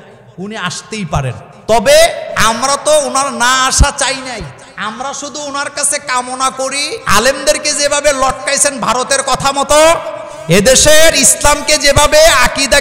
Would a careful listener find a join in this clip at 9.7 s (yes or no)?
no